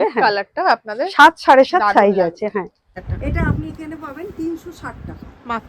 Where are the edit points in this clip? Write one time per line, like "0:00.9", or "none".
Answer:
0:02.9